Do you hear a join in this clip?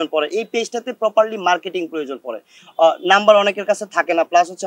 yes; 1 cut; at 2.6 s

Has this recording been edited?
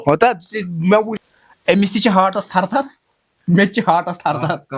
yes; 1 cut; at 1.2 s

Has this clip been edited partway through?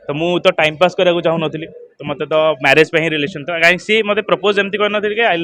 no; 0 cuts

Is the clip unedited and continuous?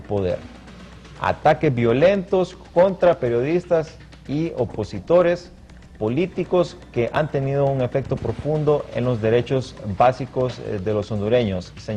no; 1 cut; at 6.8 s

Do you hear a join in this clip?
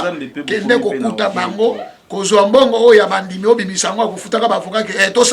no; 0 cuts

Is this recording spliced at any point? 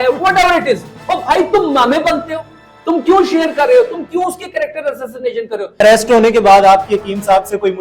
yes; 1 cut; at 5.8 s

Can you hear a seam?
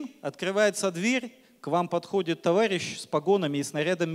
no; 0 cuts

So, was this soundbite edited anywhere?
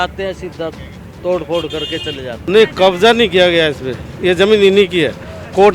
yes; 1 cut; at 2.5 s

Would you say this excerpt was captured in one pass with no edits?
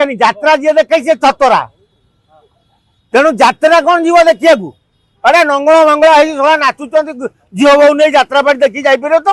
yes; 0 cuts

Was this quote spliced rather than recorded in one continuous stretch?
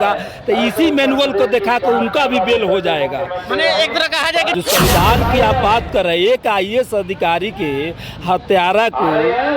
yes; 1 cut; at 4.5 s

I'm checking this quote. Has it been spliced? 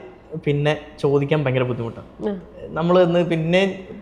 no; 0 cuts

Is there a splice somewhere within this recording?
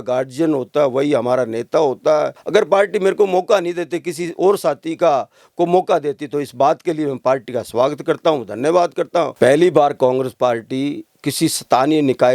yes; 2 cuts; at 2.4 s, 9.3 s

